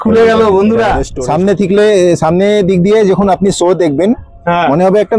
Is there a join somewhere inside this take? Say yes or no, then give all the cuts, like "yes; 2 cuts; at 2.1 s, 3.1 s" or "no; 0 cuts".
yes; 1 cut; at 1.1 s